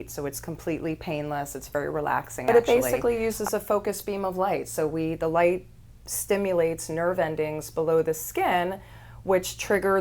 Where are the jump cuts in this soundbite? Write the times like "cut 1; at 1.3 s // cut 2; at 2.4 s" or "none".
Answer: cut 1; at 2.4 s